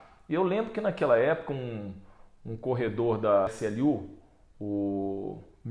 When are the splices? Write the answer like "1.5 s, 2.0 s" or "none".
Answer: 3.5 s